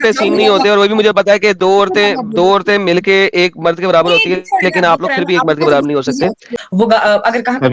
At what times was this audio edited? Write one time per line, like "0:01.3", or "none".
0:06.5

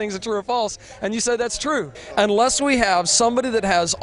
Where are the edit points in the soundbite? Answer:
0:02.0

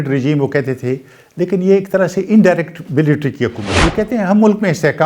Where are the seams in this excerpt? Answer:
0:03.7

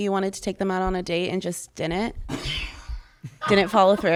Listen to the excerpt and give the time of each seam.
none

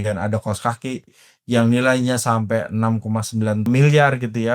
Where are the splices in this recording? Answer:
0:03.7

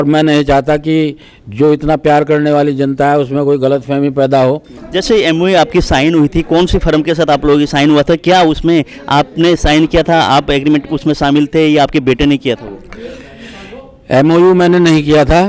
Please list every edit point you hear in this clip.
0:04.7

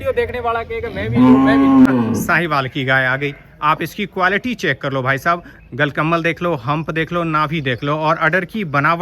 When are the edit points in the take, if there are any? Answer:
0:01.8

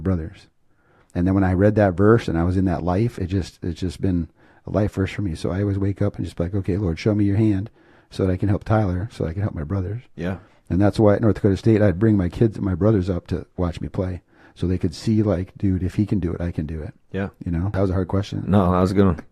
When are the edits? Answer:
0:17.8

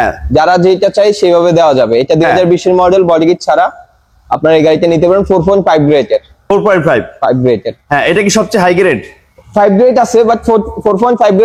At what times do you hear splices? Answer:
none

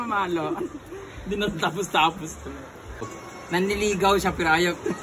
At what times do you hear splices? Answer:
0:03.1

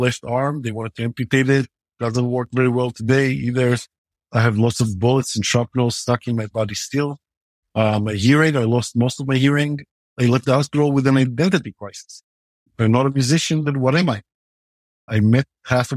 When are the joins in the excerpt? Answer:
0:01.8
0:10.1
0:15.1

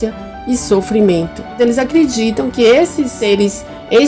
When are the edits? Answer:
0:01.5
0:03.2

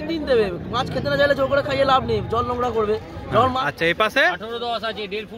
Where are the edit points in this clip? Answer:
0:03.6

